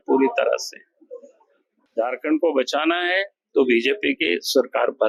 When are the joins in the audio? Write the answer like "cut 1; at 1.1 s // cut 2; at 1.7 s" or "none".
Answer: none